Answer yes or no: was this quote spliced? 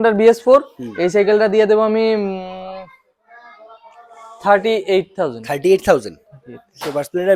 no